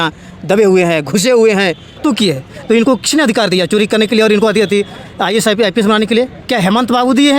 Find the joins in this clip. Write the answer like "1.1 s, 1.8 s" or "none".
2.0 s